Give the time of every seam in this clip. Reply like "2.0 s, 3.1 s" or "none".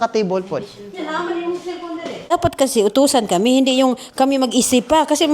2.3 s